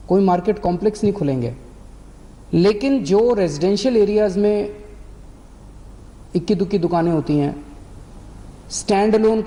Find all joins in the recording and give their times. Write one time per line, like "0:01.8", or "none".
none